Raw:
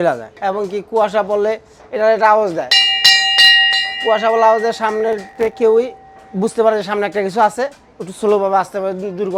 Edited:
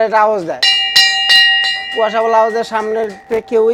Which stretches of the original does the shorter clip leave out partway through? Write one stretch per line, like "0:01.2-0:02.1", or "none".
none